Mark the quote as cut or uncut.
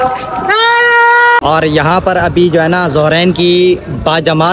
cut